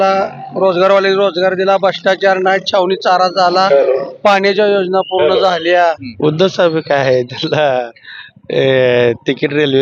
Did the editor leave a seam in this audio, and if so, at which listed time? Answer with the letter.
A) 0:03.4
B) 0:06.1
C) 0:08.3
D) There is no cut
B